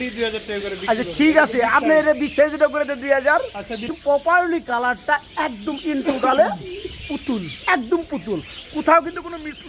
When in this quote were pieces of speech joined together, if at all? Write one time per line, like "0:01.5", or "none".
0:04.2